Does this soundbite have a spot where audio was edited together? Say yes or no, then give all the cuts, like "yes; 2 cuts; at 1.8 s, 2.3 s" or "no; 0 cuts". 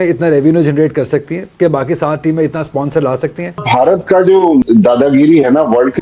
yes; 2 cuts; at 3.5 s, 4.6 s